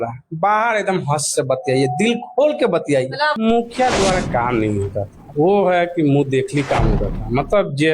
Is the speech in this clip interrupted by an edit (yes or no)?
yes